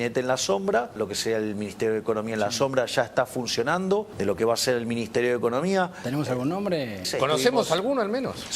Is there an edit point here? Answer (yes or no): yes